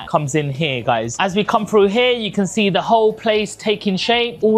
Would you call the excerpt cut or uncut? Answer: uncut